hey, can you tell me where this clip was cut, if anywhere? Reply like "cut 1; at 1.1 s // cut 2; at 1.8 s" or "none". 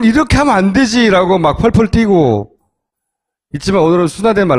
none